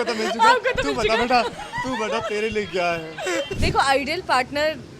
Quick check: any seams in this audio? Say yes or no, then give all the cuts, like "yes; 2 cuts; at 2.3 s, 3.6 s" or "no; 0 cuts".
yes; 1 cut; at 3.5 s